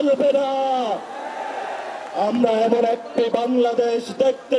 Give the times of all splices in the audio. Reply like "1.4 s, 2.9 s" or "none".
none